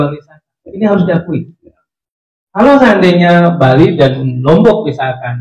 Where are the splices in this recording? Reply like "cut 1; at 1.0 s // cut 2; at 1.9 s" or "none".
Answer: none

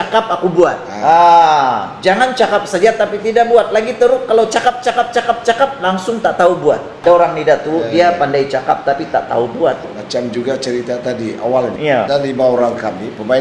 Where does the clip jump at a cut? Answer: cut 1; at 6.9 s // cut 2; at 9.9 s // cut 3; at 11.9 s

